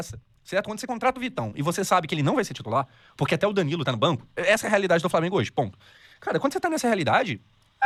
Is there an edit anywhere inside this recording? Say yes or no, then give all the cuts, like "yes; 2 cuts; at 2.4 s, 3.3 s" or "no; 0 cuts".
no; 0 cuts